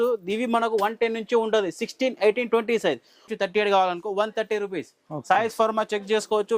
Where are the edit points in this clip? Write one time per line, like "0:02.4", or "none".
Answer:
0:03.3